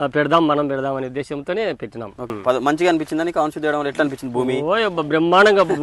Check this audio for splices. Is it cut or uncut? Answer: cut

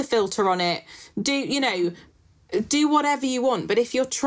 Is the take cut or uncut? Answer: uncut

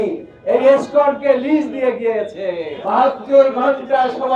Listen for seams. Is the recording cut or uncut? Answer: cut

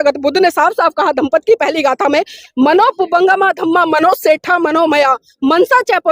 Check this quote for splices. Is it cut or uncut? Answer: cut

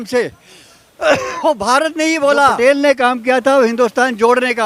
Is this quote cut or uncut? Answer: cut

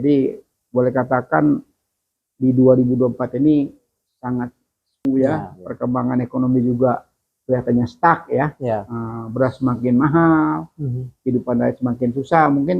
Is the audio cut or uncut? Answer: cut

